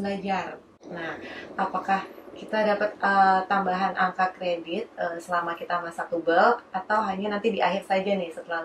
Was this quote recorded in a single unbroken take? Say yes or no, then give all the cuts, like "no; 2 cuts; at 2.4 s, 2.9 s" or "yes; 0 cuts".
yes; 0 cuts